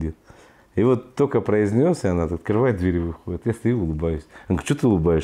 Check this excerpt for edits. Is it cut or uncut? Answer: uncut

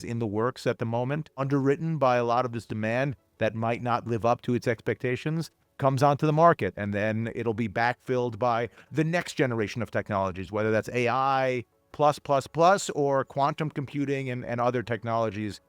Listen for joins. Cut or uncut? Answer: cut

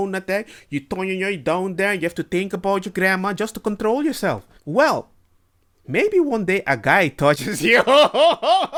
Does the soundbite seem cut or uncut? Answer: uncut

